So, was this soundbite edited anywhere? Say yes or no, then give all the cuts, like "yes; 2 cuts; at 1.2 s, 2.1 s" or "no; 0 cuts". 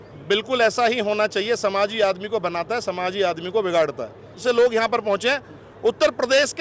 yes; 1 cut; at 4.3 s